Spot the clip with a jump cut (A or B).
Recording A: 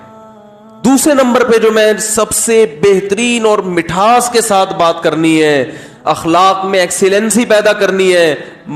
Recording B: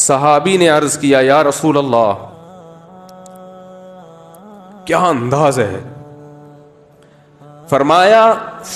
B